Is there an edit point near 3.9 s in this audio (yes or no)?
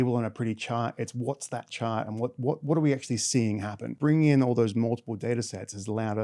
yes